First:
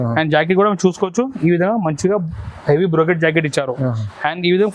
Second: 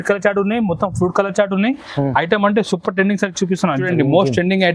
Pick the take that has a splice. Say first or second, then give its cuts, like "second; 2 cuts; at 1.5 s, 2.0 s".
second; 1 cut; at 3.8 s